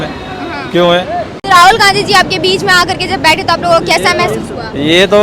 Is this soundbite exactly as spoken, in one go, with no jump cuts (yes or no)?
no